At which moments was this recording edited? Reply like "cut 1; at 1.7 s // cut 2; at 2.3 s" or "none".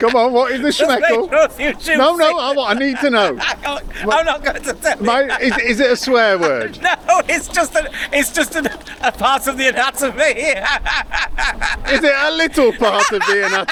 none